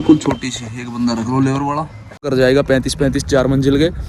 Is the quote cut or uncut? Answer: cut